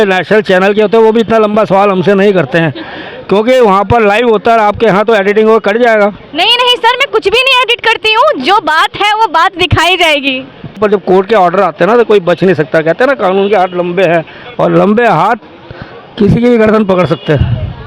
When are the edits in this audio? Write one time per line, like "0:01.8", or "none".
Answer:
0:10.8